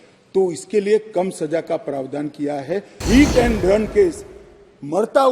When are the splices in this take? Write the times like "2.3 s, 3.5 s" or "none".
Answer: 3.0 s